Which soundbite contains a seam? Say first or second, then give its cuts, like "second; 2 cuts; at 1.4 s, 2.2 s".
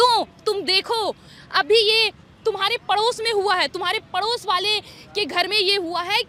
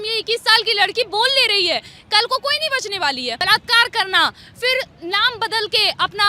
second; 1 cut; at 3.4 s